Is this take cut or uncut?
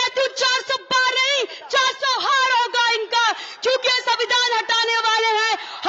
uncut